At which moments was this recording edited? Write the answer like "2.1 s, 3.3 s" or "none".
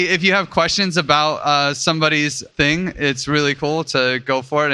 2.4 s